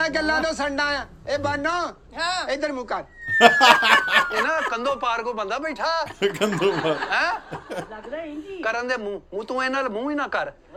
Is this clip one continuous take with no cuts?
yes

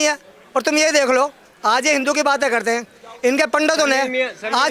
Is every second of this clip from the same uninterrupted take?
yes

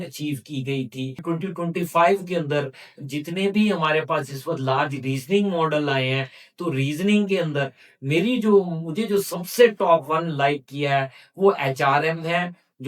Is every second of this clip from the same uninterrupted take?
no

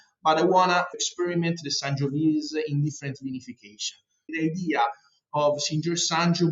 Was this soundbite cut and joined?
yes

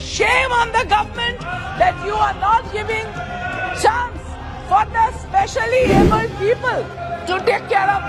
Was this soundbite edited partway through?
yes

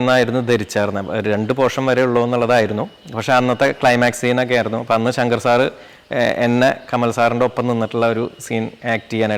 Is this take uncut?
yes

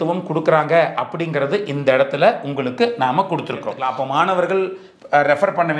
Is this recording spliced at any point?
yes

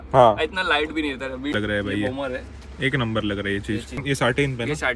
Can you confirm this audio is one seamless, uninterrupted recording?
no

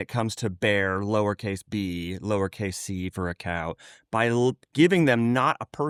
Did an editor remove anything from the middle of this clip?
no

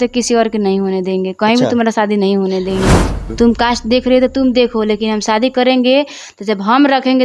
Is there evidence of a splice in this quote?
yes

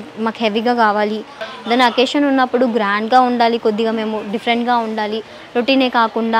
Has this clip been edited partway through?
yes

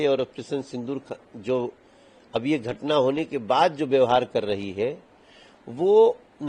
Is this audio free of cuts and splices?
yes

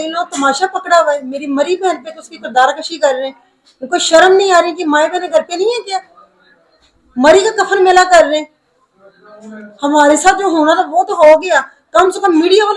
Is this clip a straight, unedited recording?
yes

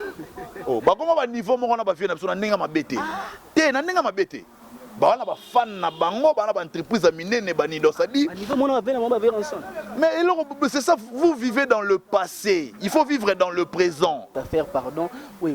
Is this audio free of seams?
no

